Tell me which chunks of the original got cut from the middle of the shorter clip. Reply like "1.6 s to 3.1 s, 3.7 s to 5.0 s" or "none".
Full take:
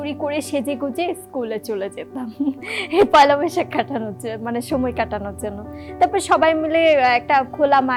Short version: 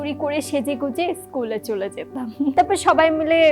2.5 s to 6.0 s